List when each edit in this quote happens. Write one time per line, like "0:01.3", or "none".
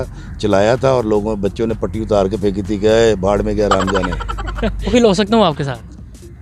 0:04.9